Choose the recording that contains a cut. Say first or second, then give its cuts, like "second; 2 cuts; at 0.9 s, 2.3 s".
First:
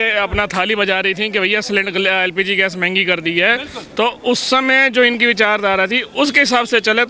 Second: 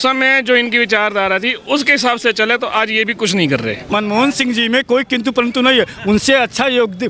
second; 1 cut; at 3.8 s